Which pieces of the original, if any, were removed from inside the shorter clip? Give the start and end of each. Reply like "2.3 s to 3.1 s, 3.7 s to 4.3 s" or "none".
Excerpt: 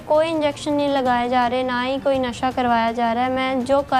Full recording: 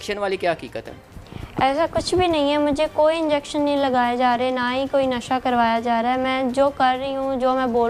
none

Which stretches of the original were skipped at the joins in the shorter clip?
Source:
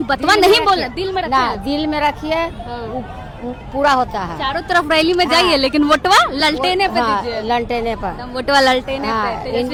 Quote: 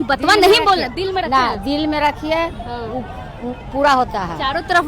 none

